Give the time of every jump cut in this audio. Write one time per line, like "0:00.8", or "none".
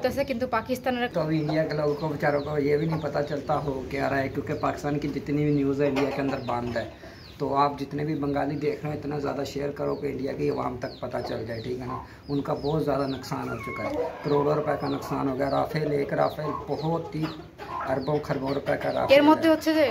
0:01.1